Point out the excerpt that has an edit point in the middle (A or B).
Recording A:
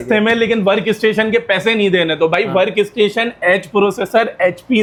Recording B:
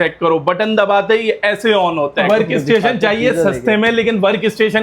B